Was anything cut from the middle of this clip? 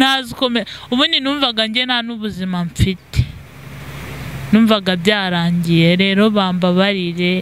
no; 0 cuts

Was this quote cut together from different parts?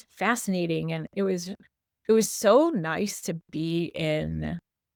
no; 0 cuts

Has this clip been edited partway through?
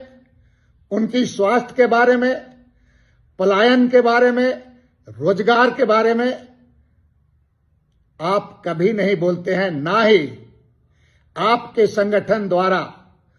no; 0 cuts

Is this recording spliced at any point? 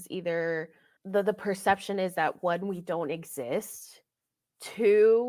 no; 0 cuts

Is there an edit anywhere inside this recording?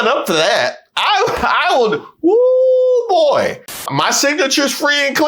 yes; 1 cut; at 3.9 s

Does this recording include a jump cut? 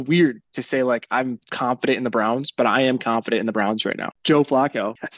yes; 1 cut; at 4.1 s

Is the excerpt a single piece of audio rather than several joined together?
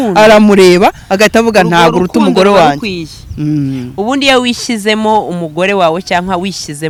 yes; 0 cuts

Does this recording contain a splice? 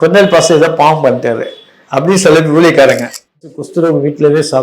yes; 1 cut; at 3.6 s

